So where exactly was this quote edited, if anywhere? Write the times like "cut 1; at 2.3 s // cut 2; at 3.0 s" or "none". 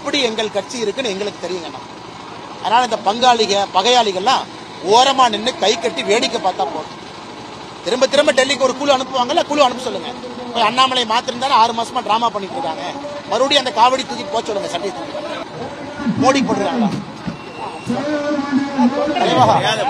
cut 1; at 15.4 s